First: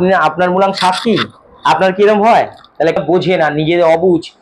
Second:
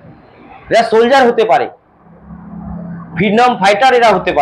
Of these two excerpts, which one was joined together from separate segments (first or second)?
first